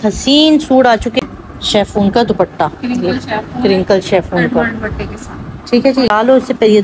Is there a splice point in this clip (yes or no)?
yes